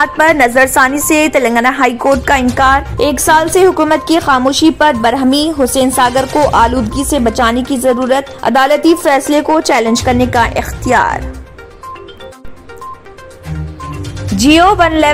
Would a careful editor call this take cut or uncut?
uncut